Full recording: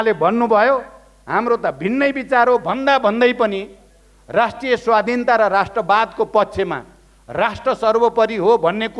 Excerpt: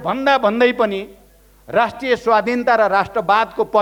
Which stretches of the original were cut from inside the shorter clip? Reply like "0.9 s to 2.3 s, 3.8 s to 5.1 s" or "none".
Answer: none

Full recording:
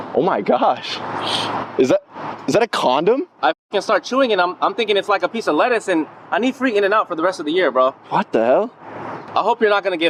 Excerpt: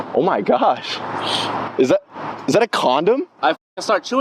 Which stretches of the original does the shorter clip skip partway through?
none

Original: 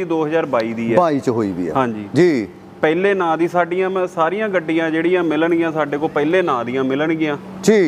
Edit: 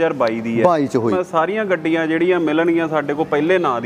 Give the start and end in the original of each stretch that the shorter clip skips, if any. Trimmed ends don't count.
1.5 s to 4.0 s

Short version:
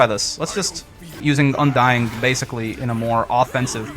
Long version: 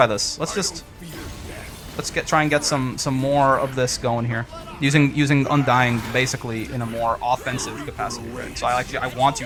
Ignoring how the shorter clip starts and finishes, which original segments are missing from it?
1.2 s to 5.1 s

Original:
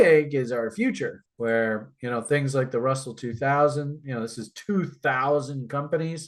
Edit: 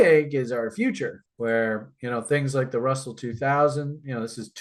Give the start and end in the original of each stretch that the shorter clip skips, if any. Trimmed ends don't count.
none

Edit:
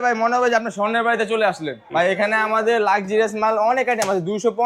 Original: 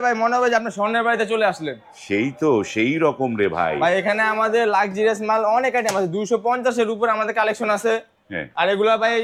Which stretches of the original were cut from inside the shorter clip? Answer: 1.9 s to 3.8 s

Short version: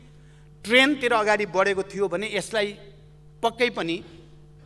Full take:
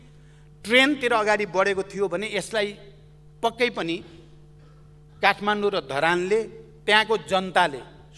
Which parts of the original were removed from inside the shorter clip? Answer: none

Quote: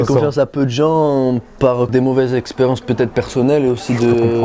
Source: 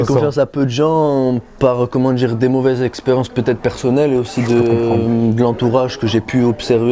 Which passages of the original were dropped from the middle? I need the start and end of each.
1.9 s to 2.4 s

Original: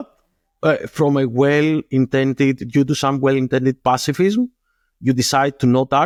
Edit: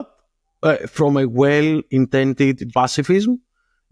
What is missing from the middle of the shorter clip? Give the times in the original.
2.7 s to 3.8 s

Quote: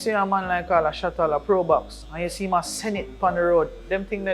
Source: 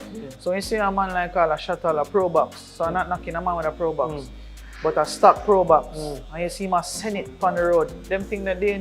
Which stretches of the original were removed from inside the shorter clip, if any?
2.6 s to 6.2 s

